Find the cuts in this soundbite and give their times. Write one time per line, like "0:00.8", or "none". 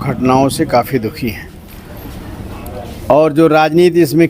0:01.7